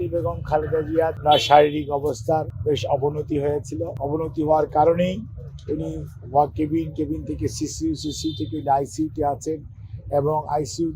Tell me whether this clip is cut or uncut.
cut